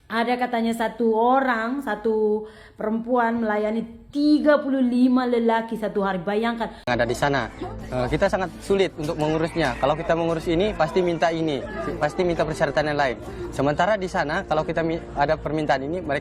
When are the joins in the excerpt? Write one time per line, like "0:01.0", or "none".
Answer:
0:06.8